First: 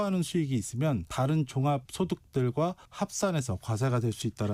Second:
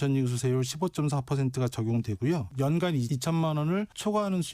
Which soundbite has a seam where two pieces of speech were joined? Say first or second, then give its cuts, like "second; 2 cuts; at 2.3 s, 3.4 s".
second; 1 cut; at 2.5 s